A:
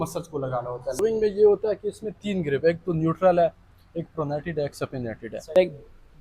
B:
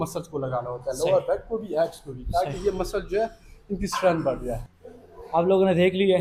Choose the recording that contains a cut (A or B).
A